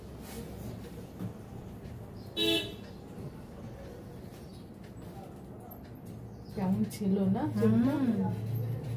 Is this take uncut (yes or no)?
yes